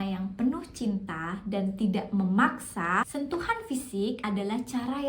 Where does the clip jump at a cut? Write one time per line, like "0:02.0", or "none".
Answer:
0:03.1
0:04.2